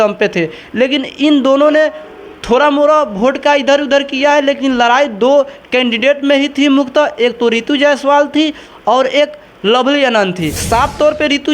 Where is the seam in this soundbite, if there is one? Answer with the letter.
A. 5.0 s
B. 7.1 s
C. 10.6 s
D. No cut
C